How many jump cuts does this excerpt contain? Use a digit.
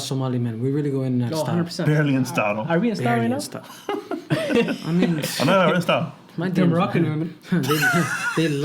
0